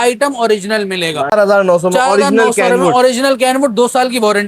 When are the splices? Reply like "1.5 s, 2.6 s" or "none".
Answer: 1.3 s